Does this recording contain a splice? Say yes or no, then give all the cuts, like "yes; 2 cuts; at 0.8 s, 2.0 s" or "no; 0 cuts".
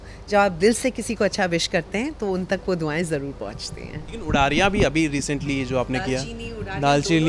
no; 0 cuts